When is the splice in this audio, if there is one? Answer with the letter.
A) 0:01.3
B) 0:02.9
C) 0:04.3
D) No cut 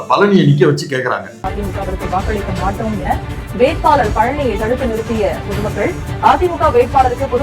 A